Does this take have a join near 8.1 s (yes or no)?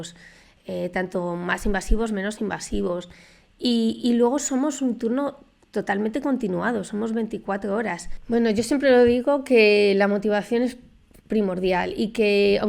yes